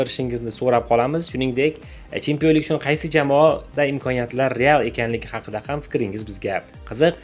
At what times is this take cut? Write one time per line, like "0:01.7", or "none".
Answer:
none